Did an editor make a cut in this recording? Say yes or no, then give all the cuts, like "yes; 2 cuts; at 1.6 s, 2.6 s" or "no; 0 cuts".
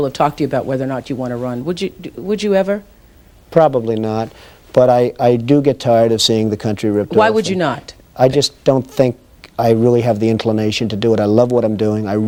no; 0 cuts